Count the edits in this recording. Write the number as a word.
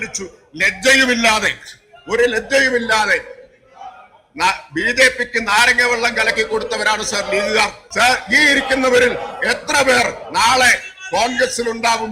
one